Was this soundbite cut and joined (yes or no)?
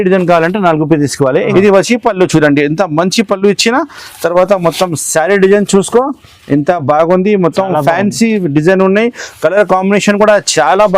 yes